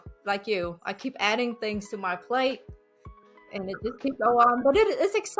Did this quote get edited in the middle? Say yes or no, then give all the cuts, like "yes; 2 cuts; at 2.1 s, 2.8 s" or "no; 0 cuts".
no; 0 cuts